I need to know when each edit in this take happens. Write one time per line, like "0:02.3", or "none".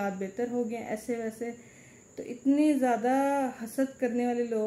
none

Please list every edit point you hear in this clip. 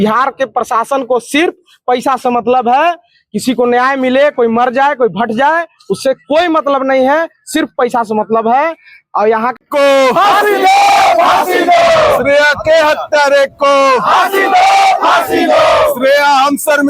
0:09.6

